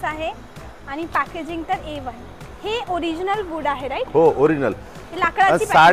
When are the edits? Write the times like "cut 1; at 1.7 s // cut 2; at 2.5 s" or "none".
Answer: none